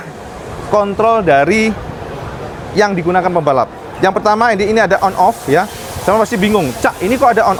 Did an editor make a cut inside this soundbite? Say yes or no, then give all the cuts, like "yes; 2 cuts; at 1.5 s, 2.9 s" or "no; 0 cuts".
no; 0 cuts